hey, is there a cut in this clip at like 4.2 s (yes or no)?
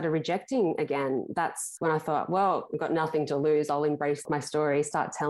yes